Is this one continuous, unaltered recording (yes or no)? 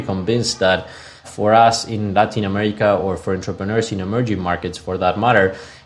no